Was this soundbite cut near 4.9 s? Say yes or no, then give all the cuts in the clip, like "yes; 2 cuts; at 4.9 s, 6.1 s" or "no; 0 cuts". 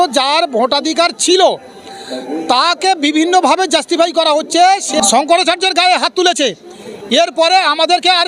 yes; 1 cut; at 4.9 s